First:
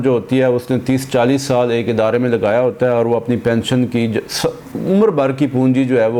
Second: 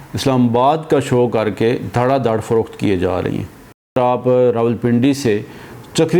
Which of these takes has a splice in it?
second; 1 cut; at 4.0 s

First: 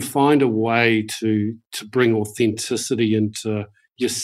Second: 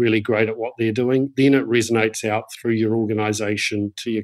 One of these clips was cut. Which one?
second; 1 cut; at 1.3 s

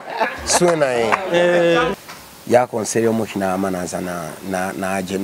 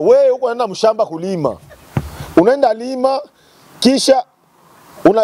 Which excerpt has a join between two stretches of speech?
first; 1 cut; at 1.9 s

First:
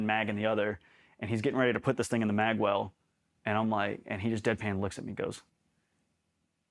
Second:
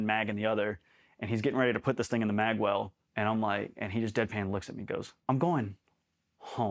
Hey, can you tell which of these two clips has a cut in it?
second; 2 cuts; at 3.0 s, 5.1 s

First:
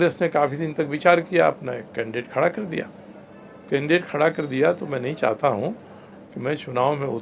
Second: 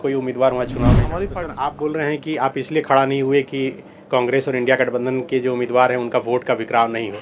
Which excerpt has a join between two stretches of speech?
second; 1 cut; at 1.2 s

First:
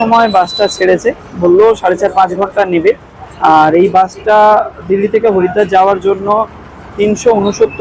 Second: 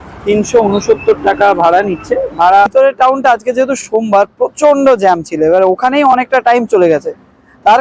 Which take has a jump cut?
second; 1 cut; at 2.7 s

